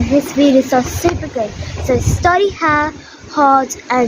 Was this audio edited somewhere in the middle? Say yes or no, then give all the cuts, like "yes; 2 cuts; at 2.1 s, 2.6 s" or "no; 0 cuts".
no; 0 cuts